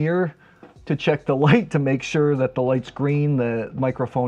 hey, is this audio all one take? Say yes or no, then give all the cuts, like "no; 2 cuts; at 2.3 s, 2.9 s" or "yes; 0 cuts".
yes; 0 cuts